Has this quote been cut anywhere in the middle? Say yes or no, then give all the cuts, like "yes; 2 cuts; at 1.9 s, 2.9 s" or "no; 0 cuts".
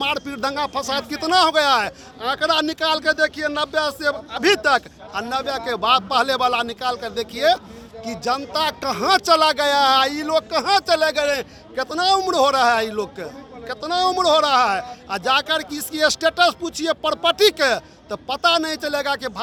no; 0 cuts